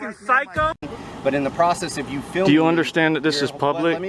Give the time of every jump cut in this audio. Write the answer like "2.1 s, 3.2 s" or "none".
1.0 s